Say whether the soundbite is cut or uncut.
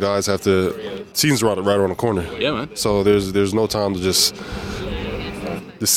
cut